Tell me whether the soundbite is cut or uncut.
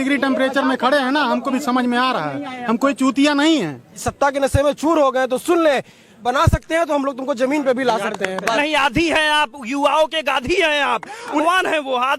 cut